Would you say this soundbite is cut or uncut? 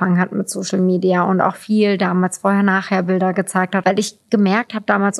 cut